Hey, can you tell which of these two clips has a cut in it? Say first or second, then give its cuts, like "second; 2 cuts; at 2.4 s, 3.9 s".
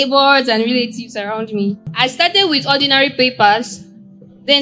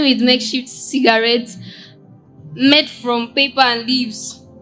first; 1 cut; at 1.9 s